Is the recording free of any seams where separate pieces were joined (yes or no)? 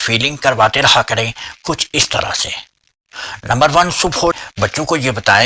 no